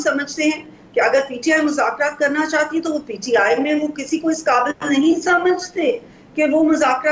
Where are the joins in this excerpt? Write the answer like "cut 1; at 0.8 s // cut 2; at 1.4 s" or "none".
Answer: none

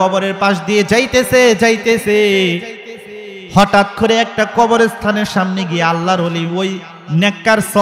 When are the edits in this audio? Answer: none

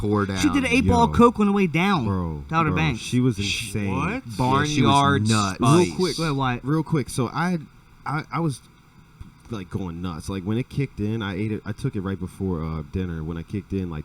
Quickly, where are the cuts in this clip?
none

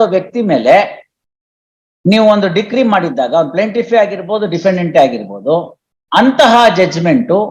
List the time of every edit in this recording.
none

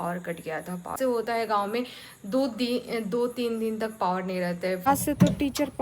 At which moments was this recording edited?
cut 1; at 0.9 s // cut 2; at 4.8 s

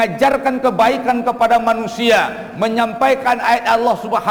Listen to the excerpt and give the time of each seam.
none

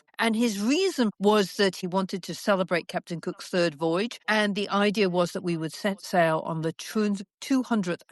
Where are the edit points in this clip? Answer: cut 1; at 1.1 s // cut 2; at 1.8 s

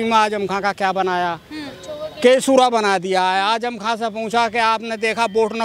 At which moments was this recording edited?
none

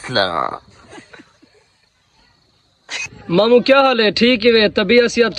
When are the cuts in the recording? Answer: cut 1; at 3.1 s

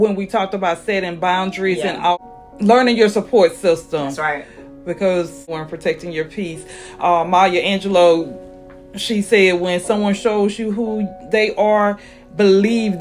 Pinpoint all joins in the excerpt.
cut 1; at 2.1 s // cut 2; at 5.6 s

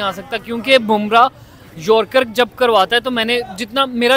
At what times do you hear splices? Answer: none

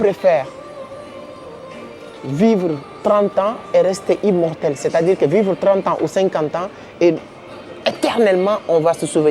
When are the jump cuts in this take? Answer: none

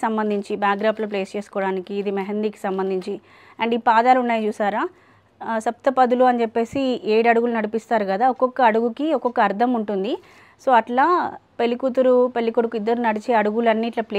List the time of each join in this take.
none

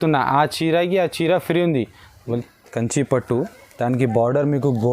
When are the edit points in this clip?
cut 1; at 2.4 s

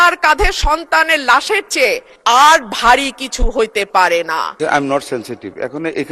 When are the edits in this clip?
cut 1; at 2.1 s // cut 2; at 4.6 s

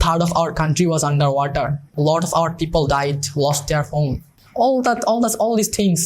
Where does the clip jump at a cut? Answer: cut 1; at 1.8 s

